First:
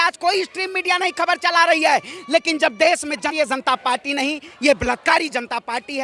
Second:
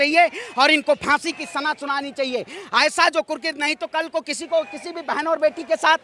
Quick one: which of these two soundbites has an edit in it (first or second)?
first